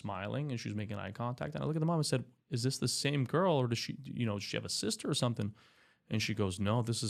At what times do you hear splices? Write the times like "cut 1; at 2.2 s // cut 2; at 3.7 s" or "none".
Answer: none